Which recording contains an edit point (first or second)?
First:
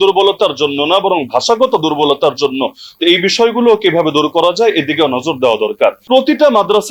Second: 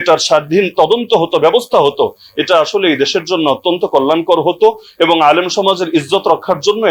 first